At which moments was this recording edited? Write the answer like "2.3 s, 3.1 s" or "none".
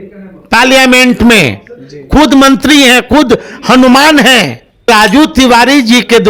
4.9 s